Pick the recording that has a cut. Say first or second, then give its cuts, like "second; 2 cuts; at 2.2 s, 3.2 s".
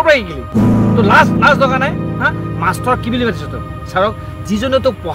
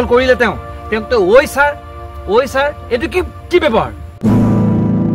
second; 1 cut; at 4.0 s